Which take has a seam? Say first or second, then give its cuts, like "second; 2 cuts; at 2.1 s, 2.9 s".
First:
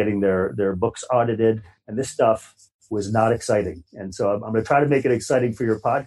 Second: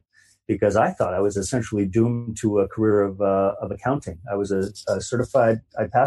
first; 1 cut; at 1.8 s